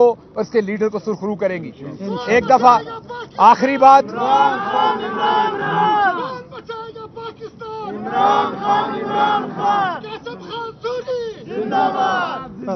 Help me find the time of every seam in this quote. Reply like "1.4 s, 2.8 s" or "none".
none